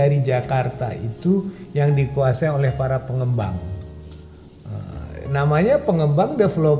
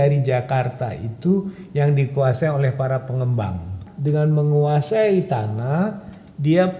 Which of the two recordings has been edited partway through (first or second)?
second